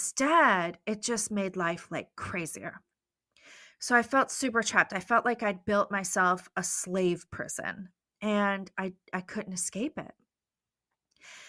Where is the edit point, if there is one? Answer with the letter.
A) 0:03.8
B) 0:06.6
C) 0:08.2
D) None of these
D